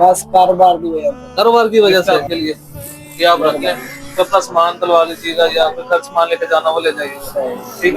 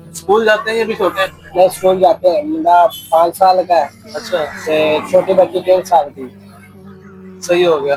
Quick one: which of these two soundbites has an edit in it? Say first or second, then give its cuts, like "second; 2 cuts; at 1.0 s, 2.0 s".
first; 1 cut; at 2.0 s